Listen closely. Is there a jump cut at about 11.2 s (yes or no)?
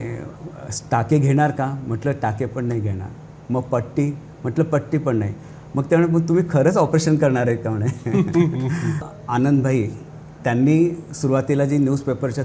no